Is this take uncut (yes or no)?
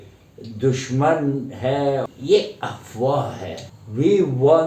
no